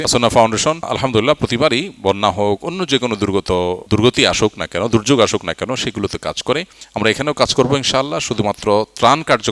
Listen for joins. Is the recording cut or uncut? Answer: cut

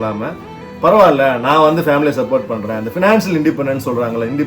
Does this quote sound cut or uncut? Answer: uncut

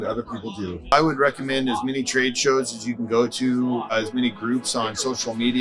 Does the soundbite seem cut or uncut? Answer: cut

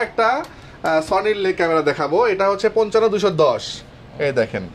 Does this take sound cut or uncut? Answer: uncut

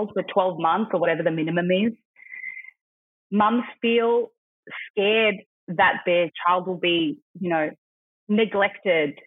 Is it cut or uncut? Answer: uncut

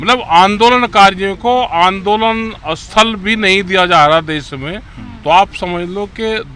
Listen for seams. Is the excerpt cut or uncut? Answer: uncut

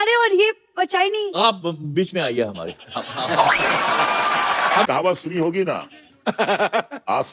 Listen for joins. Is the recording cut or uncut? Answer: cut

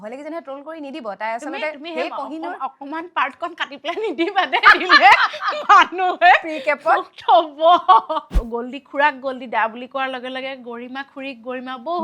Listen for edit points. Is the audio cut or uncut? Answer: cut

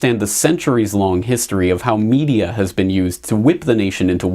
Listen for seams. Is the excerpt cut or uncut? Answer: cut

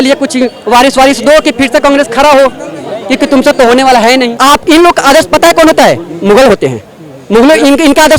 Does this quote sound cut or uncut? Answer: cut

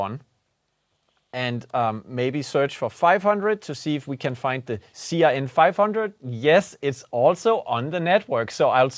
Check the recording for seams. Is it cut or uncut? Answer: uncut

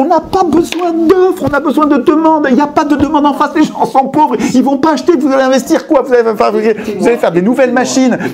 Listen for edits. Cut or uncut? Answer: uncut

